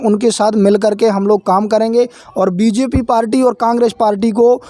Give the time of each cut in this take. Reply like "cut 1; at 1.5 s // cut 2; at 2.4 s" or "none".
none